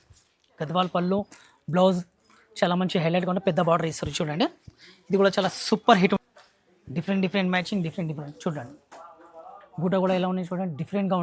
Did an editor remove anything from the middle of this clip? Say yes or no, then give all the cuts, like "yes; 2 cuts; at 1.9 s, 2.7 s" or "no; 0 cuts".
yes; 1 cut; at 6.2 s